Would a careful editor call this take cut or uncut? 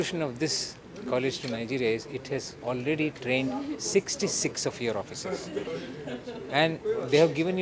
cut